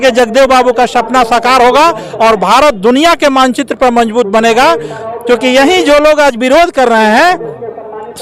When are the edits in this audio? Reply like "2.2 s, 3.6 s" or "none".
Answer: none